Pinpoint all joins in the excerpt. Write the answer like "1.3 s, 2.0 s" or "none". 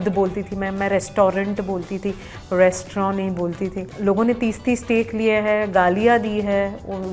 none

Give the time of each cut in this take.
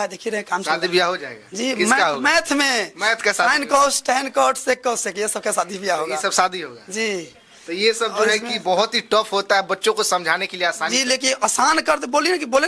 none

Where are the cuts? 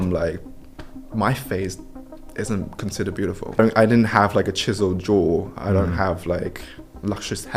3.6 s

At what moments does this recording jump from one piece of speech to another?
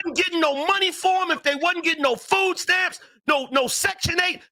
none

